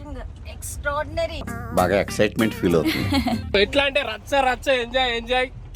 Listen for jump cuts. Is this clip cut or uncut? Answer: cut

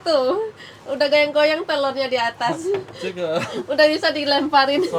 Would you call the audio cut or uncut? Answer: uncut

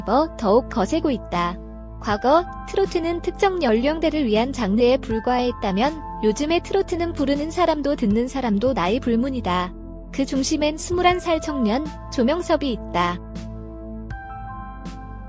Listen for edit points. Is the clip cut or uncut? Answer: uncut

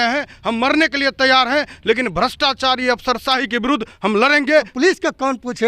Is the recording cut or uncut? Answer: cut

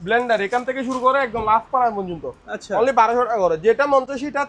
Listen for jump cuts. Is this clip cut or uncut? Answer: uncut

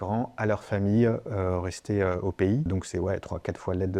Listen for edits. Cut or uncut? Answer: cut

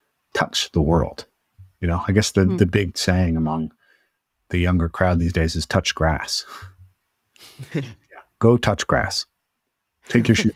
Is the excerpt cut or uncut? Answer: uncut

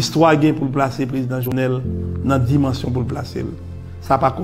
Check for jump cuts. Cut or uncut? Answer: cut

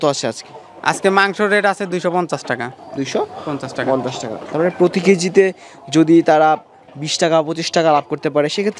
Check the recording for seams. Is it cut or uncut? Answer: uncut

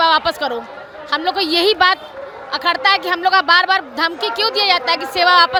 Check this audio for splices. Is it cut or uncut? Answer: uncut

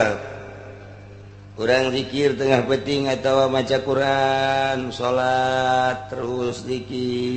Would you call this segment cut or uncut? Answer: uncut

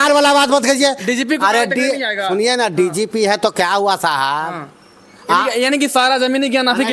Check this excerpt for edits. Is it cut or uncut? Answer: uncut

